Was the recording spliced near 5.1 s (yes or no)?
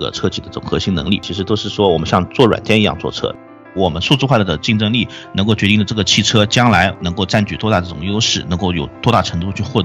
no